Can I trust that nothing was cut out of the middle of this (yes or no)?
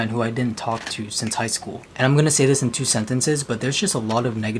no